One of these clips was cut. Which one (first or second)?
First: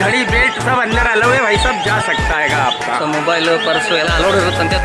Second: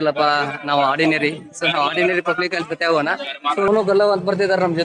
second